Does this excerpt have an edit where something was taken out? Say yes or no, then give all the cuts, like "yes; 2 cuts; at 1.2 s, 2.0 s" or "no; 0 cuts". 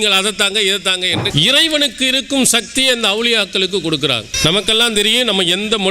yes; 2 cuts; at 1.3 s, 4.3 s